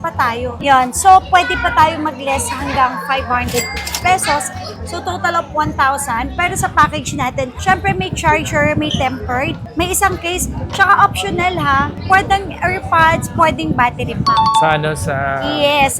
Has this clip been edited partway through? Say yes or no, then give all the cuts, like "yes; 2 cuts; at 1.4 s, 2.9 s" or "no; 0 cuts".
no; 0 cuts